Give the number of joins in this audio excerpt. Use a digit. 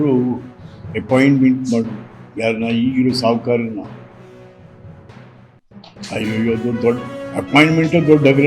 2